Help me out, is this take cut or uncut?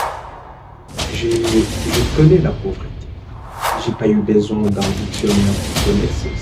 uncut